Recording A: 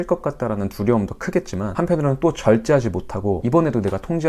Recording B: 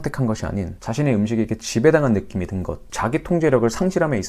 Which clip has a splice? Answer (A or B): A